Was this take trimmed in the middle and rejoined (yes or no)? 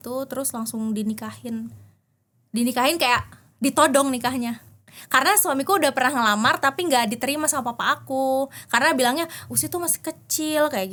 no